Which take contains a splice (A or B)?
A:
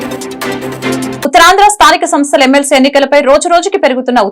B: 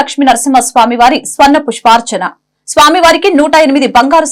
A